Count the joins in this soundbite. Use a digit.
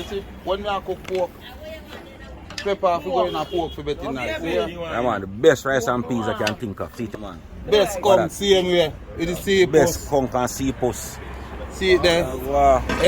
1